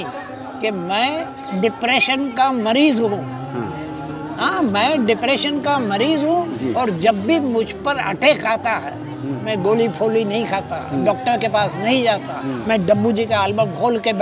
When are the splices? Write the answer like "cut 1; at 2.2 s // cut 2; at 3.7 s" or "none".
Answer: none